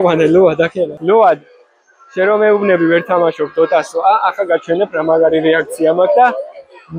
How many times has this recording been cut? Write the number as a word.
one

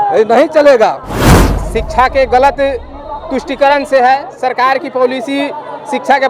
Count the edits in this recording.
one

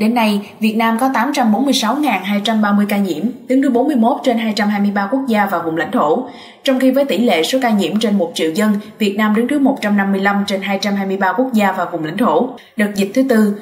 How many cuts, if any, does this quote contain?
one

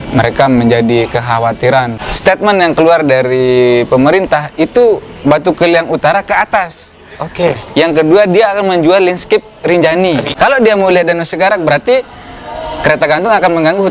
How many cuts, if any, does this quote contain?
two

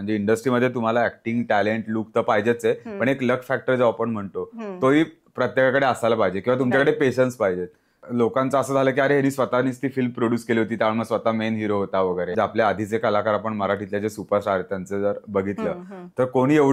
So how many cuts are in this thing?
two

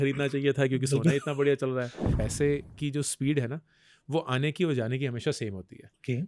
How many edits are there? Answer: one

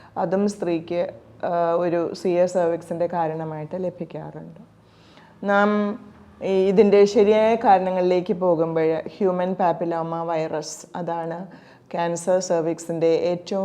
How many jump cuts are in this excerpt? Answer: zero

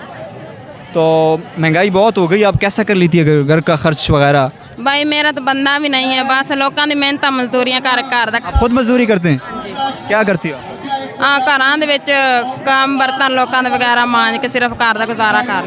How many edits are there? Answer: zero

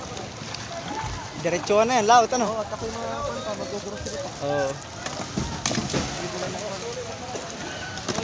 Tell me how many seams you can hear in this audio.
zero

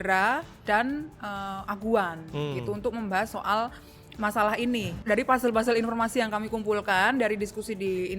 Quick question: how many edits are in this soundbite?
one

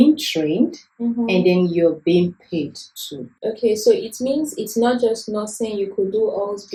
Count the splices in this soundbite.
zero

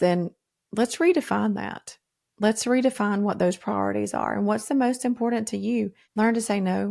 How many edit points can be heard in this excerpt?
one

